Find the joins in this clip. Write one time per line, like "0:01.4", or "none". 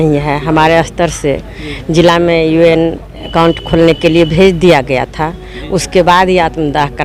none